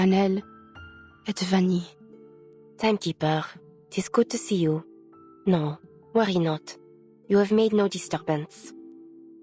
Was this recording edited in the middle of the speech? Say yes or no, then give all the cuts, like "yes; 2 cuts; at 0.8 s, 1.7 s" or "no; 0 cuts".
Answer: yes; 1 cut; at 8.5 s